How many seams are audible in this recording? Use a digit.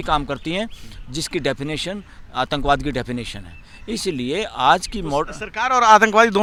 0